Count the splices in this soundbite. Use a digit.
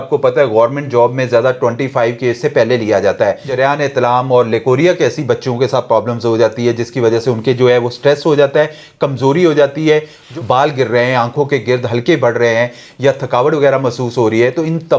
2